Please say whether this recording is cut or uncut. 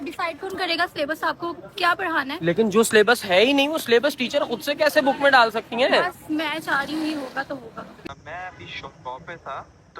cut